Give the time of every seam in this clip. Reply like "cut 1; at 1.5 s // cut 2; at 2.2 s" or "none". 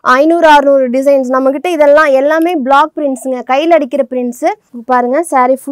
cut 1; at 4.7 s